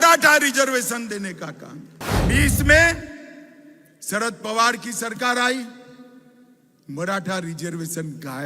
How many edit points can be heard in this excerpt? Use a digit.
1